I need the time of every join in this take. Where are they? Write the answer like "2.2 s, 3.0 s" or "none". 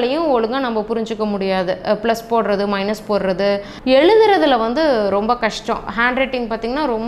3.7 s